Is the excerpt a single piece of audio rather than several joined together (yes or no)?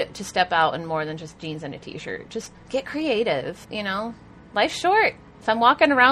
no